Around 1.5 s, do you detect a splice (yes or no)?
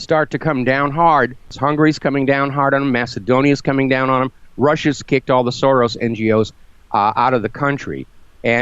yes